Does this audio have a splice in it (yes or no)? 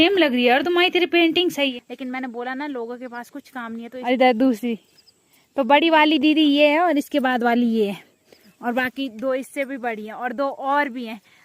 yes